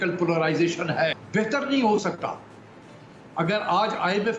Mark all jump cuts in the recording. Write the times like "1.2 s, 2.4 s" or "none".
1.2 s